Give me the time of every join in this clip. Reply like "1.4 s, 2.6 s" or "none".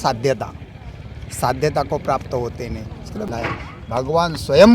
3.3 s